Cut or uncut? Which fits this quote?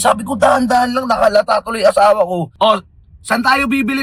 cut